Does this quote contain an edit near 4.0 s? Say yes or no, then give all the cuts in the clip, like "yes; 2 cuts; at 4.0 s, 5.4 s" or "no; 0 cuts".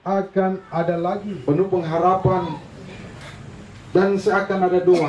no; 1 cut; at 1.3 s